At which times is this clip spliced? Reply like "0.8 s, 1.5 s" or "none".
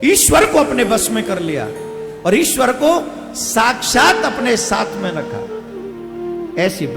none